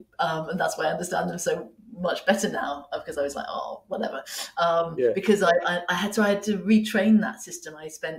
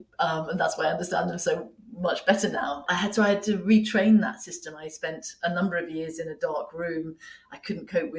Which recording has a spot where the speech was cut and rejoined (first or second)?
second